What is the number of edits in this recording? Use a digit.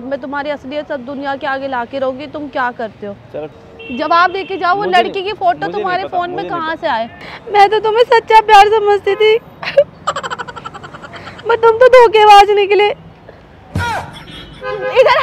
2